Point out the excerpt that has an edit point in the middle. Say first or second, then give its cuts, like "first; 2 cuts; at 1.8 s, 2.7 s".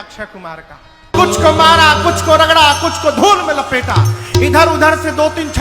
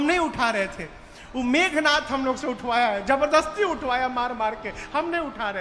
first; 1 cut; at 1.1 s